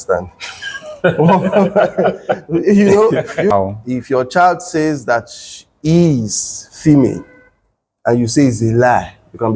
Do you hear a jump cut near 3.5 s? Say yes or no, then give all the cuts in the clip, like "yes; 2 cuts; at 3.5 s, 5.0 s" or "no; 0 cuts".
yes; 1 cut; at 3.5 s